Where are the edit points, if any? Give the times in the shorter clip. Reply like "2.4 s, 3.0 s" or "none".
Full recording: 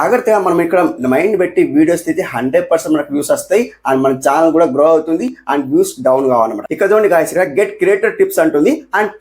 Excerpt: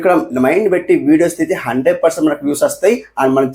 none